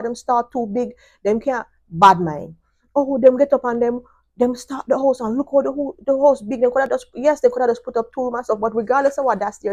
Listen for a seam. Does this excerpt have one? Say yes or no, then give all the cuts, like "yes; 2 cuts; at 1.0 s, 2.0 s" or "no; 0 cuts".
no; 0 cuts